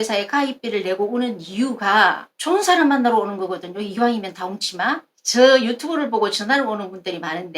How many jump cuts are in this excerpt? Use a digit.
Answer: 1